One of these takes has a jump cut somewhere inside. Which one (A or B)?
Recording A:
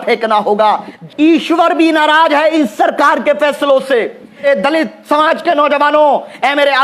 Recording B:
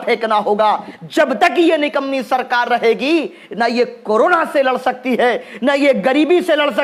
A